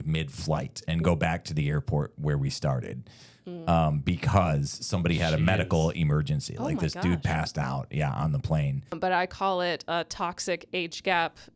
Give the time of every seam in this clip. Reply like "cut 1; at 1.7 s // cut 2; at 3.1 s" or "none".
cut 1; at 9.0 s